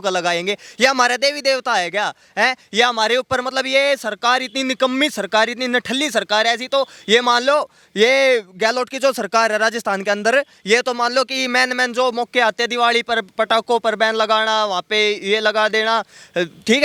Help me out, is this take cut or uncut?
uncut